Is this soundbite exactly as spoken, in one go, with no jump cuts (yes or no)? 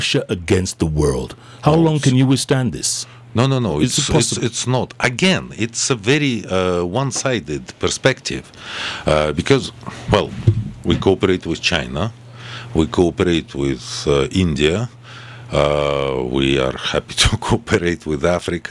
yes